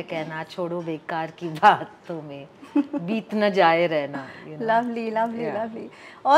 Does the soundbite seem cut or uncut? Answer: uncut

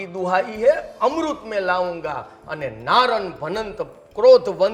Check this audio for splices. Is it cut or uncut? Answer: uncut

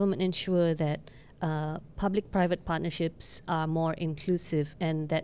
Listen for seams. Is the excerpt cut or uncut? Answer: uncut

